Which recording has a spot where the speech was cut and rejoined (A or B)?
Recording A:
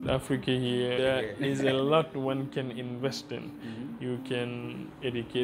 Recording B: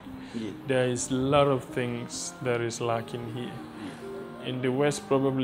A